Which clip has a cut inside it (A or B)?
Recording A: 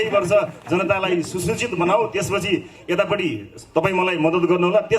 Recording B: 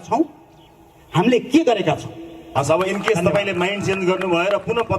B